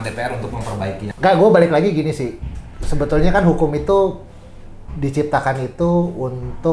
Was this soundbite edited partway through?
yes; 1 cut; at 1.0 s

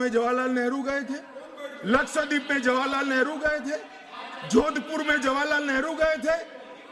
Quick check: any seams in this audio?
no; 0 cuts

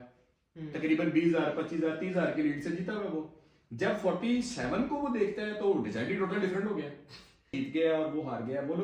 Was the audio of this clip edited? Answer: yes; 1 cut; at 7.5 s

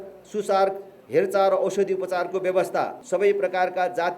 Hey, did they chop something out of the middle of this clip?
yes; 1 cut; at 3.0 s

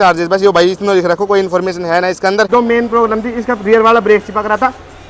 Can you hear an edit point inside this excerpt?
yes; 1 cut; at 2.5 s

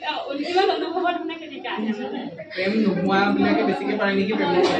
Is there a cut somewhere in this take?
no; 0 cuts

